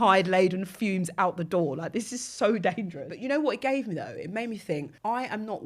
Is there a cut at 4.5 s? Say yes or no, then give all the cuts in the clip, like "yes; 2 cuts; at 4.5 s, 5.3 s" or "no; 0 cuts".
no; 1 cut; at 3.0 s